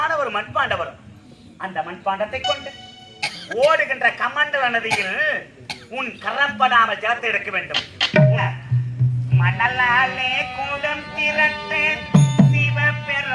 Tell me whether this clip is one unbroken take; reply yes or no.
no